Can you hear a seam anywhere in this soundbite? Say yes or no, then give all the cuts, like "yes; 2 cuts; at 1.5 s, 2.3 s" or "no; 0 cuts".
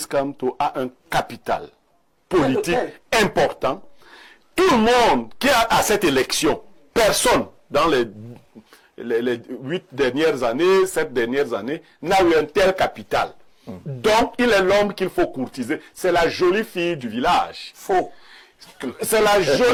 no; 0 cuts